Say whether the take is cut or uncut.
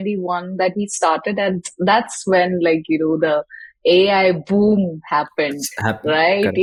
uncut